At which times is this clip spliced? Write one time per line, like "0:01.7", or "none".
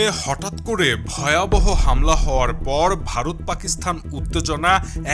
none